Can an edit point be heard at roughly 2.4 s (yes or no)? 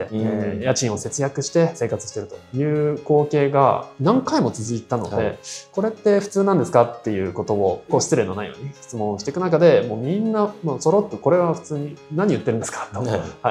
no